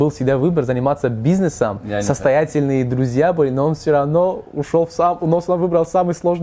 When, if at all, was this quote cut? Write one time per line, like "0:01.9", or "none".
none